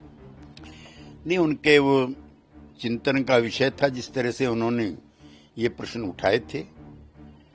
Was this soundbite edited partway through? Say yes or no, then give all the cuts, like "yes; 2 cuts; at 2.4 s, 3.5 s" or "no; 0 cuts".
yes; 1 cut; at 1.2 s